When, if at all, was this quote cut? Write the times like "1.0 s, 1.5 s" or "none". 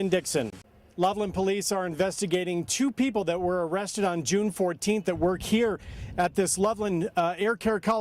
1.0 s

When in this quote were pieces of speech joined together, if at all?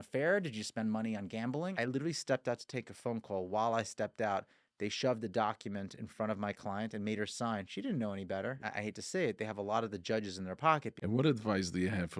1.7 s, 8.6 s, 10.9 s

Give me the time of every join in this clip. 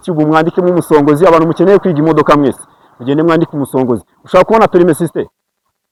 none

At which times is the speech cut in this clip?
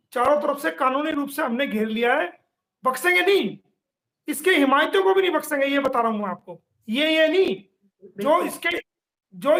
none

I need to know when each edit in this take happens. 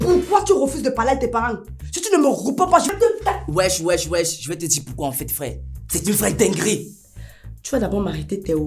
none

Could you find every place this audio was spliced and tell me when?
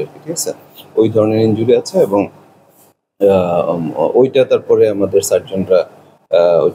none

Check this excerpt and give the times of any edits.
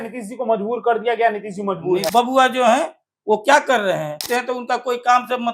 2.1 s, 4.2 s

